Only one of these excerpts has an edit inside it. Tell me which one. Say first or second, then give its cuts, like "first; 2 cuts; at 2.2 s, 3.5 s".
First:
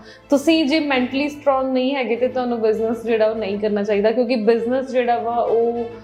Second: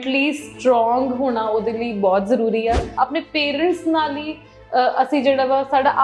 second; 1 cut; at 2.9 s